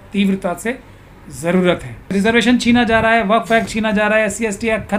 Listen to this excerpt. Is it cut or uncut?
cut